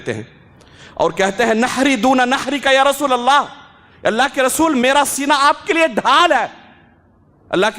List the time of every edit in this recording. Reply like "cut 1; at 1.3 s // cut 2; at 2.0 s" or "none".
none